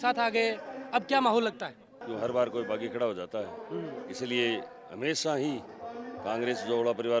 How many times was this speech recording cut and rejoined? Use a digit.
1